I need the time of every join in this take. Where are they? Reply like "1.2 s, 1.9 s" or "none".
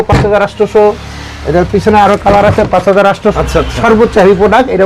3.3 s